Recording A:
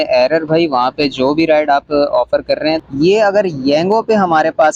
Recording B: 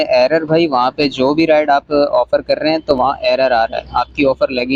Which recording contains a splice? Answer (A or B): A